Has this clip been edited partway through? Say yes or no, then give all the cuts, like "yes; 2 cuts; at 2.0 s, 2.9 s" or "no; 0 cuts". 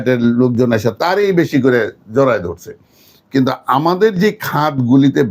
no; 0 cuts